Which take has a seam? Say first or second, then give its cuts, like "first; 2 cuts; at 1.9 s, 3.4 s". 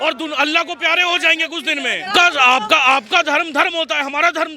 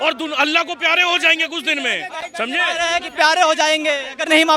first; 1 cut; at 2.1 s